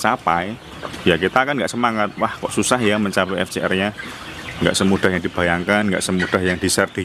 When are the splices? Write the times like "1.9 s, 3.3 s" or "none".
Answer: none